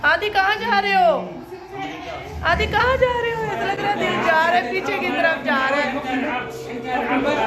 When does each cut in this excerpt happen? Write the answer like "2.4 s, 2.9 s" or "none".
none